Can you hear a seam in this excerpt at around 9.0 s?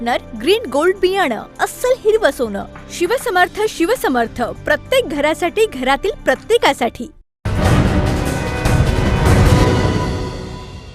no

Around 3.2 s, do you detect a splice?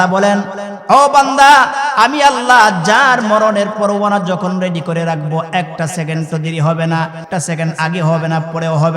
no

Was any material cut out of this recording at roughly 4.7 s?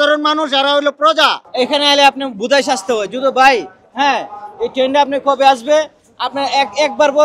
no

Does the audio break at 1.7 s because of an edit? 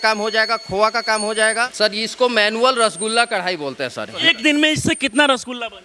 yes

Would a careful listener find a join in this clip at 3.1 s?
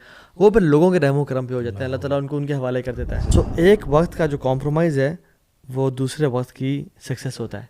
yes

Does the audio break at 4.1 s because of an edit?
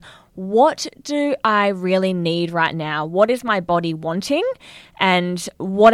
no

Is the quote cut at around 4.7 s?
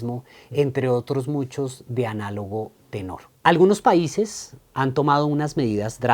no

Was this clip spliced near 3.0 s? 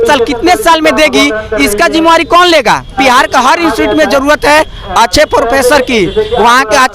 yes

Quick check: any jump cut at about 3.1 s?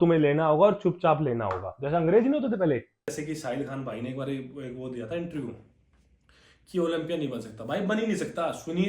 yes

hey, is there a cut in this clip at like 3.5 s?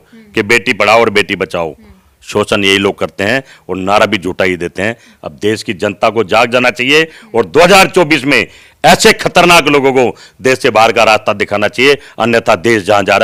no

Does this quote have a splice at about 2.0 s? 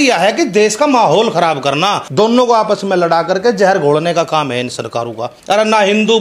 yes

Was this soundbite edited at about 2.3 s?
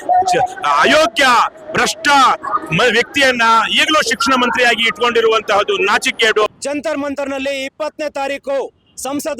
no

